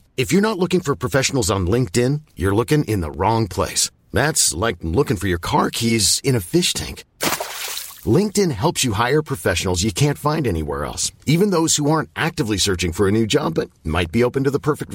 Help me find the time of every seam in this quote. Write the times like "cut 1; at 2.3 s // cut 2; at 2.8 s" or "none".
none